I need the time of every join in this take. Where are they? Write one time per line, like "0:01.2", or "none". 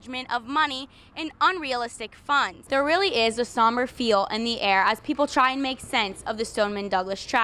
0:02.6